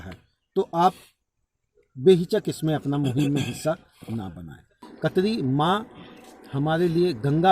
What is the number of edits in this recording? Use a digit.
1